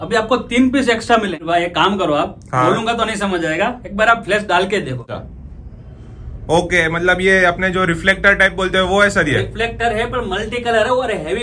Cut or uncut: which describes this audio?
cut